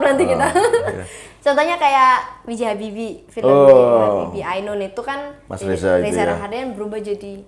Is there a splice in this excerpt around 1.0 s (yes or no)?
no